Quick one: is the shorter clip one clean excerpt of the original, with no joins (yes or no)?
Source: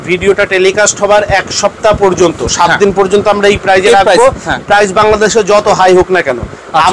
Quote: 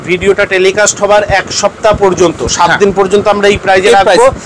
yes